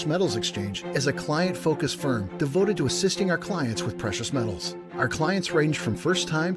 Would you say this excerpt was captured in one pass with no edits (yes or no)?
yes